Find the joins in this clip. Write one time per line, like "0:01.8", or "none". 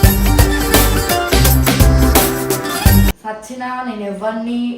0:03.3